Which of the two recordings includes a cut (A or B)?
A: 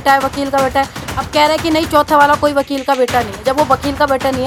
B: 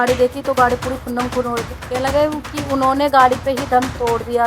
B